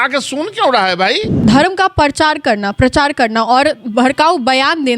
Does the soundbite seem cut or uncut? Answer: cut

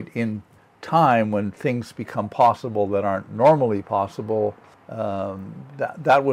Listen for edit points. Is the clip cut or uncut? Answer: uncut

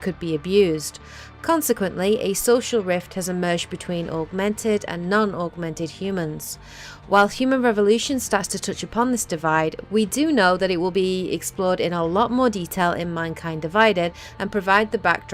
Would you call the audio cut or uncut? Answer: uncut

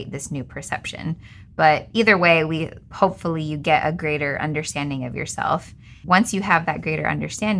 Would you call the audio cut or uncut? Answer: uncut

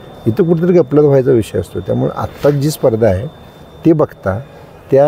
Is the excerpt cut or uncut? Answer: uncut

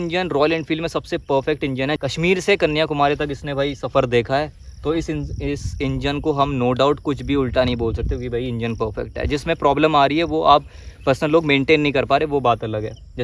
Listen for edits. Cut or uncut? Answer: uncut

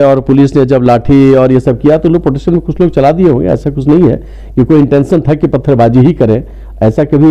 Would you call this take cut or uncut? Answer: uncut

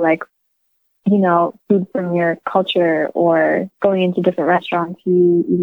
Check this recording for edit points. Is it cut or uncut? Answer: uncut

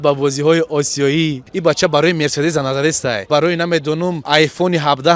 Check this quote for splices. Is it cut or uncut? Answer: cut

